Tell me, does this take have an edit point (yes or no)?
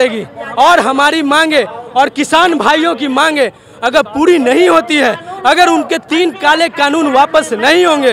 no